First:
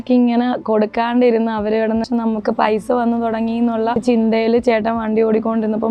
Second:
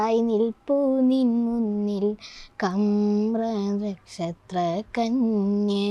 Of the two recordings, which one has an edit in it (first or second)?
first